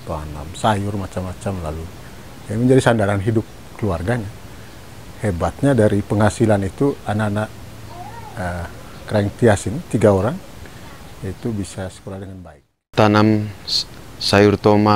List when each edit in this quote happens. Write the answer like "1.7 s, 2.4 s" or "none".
12.9 s